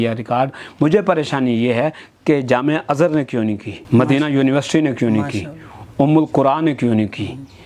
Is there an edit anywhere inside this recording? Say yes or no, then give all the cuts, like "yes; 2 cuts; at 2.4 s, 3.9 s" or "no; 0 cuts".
no; 0 cuts